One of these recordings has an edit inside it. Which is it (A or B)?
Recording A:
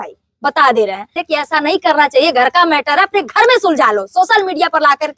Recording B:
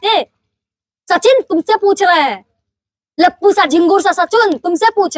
A